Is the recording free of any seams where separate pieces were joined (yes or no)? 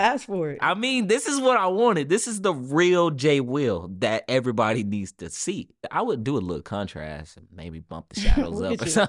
no